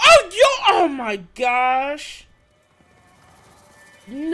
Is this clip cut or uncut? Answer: uncut